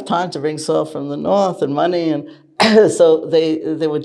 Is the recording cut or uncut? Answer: uncut